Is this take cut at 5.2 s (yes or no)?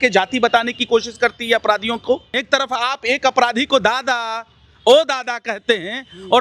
no